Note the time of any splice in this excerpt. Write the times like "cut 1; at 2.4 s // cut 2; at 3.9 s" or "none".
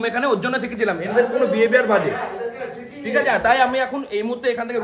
none